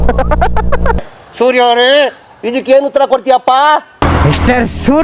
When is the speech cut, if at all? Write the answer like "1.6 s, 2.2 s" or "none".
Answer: 3.9 s